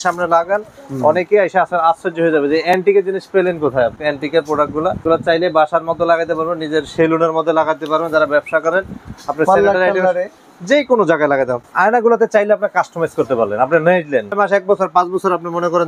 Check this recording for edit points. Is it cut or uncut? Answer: cut